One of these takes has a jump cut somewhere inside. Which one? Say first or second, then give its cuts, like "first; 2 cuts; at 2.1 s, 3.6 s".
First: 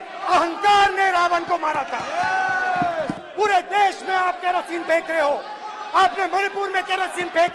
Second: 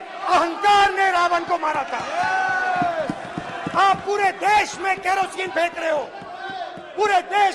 first; 1 cut; at 3.2 s